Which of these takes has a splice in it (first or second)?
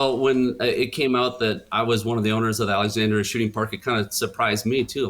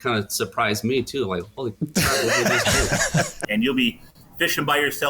second